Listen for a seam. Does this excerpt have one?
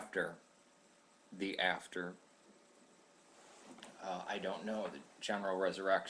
no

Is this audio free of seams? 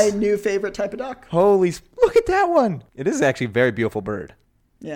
no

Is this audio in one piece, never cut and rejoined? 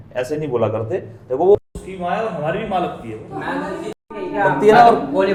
yes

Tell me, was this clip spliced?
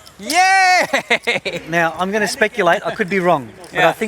no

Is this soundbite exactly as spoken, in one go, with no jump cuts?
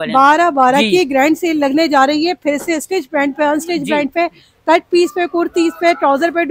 yes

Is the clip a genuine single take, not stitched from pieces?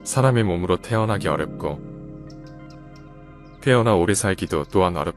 yes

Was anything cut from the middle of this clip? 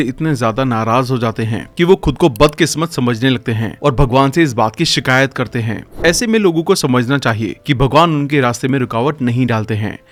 no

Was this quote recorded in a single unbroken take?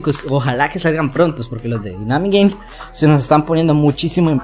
yes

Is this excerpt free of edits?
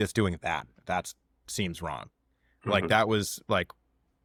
yes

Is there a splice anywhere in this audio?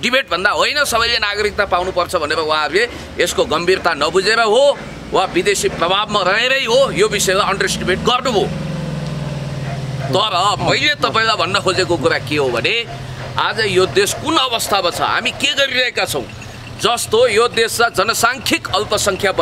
no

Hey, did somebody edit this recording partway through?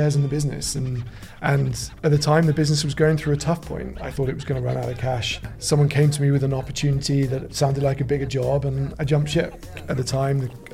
yes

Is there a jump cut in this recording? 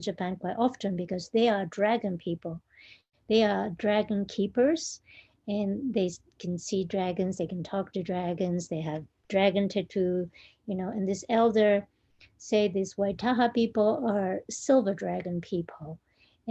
no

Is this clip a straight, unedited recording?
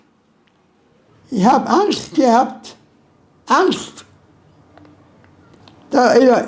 no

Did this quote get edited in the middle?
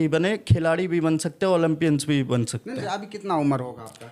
yes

